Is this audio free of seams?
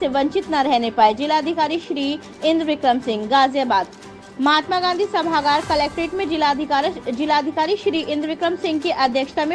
yes; 0 cuts

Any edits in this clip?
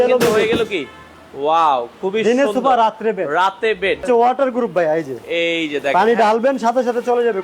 yes; 1 cut; at 4.0 s

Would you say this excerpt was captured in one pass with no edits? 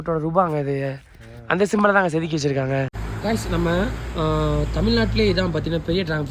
no; 1 cut; at 3.0 s

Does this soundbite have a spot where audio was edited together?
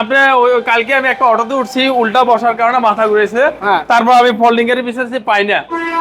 no; 0 cuts

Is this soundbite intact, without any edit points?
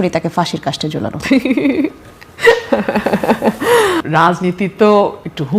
no; 1 cut; at 4.0 s

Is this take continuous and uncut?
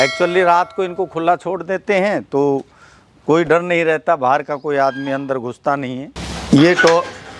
yes; 0 cuts

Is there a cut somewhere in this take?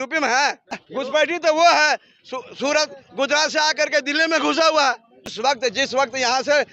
yes; 2 cuts; at 0.8 s, 5.3 s

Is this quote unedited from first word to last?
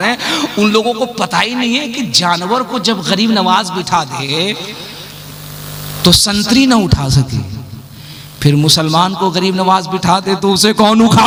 yes; 0 cuts

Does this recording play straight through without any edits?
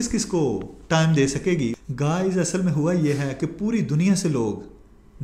yes; 0 cuts

